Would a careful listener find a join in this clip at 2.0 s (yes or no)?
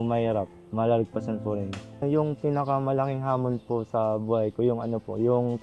yes